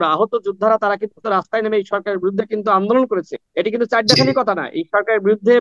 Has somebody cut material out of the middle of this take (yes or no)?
yes